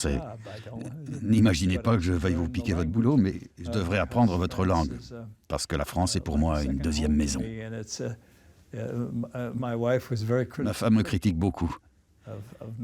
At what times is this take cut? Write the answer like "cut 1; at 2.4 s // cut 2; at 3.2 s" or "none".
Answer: none